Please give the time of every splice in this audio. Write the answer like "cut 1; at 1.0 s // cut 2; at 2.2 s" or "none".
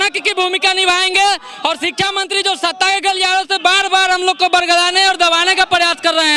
none

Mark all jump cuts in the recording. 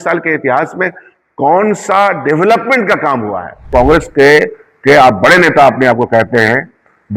cut 1; at 3.7 s

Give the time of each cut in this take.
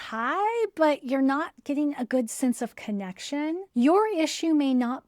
cut 1; at 1.5 s

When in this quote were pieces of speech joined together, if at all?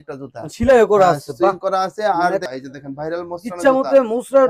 cut 1; at 2.5 s

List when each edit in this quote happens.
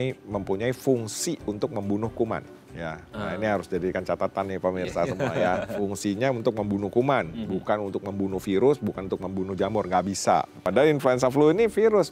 cut 1; at 10.6 s

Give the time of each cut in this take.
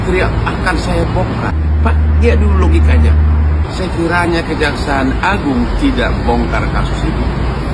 cut 1; at 1.5 s // cut 2; at 3.6 s

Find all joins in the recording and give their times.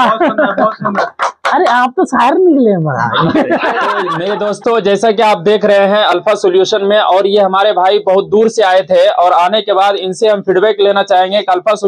cut 1; at 4.2 s

